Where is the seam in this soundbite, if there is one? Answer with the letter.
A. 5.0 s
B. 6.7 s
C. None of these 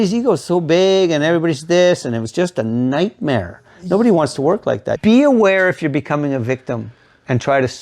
A